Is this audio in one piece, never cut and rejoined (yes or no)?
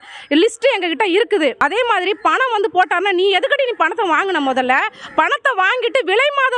no